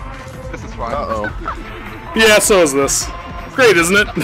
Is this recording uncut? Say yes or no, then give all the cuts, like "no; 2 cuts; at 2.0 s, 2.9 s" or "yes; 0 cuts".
yes; 0 cuts